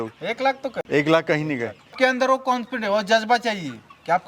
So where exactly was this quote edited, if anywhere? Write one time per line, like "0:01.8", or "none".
0:00.8
0:01.9

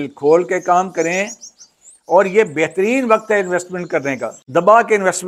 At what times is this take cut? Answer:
0:04.4

